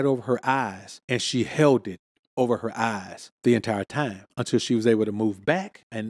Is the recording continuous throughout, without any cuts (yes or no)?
yes